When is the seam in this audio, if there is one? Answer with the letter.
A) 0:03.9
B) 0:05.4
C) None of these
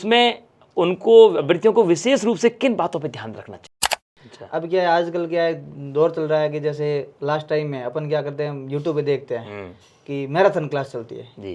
A